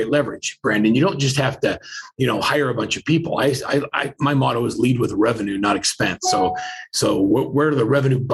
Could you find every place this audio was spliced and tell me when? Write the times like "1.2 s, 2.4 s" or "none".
none